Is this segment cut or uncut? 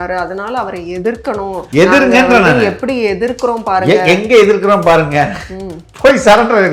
uncut